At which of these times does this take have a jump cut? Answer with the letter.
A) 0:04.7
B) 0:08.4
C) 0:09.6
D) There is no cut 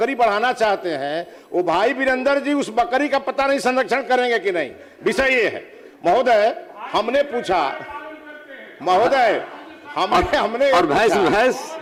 D